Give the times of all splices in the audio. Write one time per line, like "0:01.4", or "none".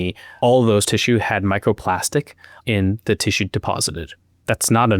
none